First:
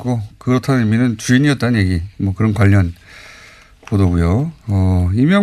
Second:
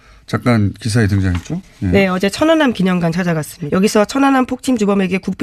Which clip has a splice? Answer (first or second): second